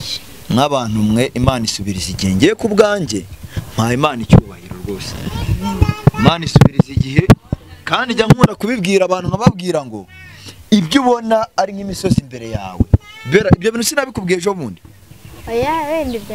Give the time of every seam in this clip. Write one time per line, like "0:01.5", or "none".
none